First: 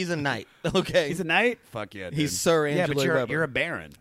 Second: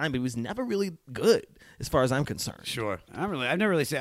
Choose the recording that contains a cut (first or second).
second